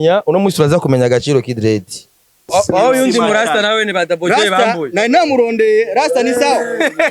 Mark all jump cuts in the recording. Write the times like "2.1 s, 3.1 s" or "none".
2.5 s